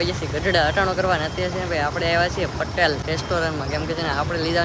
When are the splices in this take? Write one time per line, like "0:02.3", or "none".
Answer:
0:03.0